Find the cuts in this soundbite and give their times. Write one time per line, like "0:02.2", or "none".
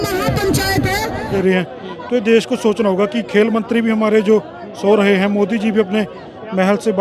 0:01.3